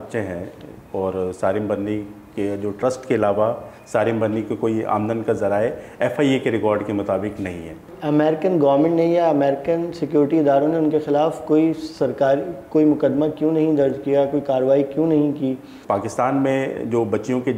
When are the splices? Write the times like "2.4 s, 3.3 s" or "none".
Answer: 7.9 s, 15.7 s